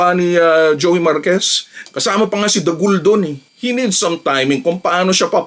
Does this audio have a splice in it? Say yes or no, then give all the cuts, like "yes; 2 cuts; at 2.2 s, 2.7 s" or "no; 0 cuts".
yes; 2 cuts; at 1.9 s, 3.4 s